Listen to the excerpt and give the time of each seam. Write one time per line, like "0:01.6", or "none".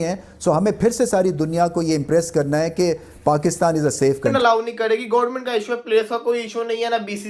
0:04.3